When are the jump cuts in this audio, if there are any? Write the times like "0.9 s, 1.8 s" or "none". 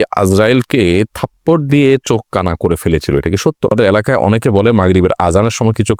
3.7 s